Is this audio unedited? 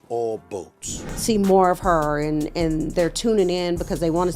no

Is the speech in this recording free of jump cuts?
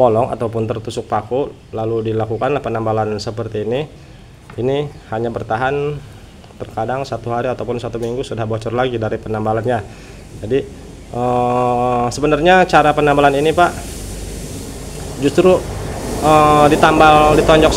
yes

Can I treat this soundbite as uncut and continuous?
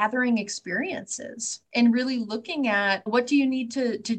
yes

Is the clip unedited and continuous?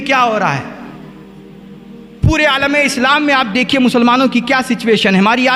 yes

